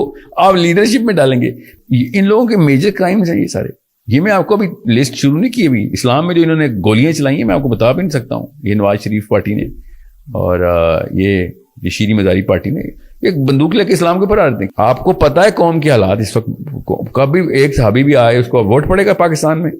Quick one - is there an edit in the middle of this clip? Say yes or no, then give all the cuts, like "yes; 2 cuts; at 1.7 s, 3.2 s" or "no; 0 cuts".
yes; 2 cuts; at 1.6 s, 14.6 s